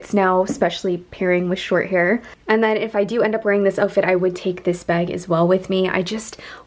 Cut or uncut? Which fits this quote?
uncut